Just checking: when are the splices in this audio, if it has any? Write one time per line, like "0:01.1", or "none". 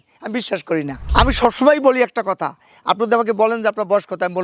0:01.0